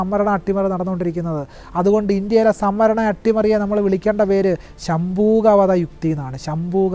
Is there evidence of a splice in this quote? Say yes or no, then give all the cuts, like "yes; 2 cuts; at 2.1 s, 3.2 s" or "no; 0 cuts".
no; 0 cuts